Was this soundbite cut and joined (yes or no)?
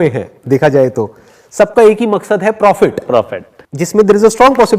yes